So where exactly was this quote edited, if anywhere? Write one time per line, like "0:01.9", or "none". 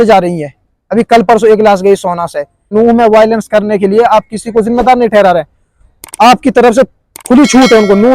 0:02.7